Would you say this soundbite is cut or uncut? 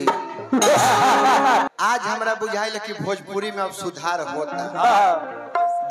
cut